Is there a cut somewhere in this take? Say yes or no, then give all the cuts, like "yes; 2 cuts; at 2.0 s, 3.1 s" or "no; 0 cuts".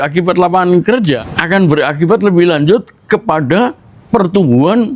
yes; 1 cut; at 1.3 s